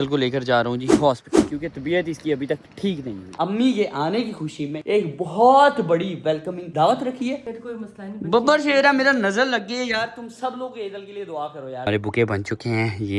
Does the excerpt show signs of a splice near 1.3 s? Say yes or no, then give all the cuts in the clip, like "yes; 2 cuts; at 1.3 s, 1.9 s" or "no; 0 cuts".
no; 3 cuts; at 3.3 s, 7.5 s, 11.9 s